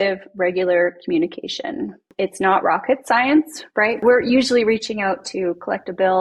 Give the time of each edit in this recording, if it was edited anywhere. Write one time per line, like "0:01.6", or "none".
0:02.1
0:04.0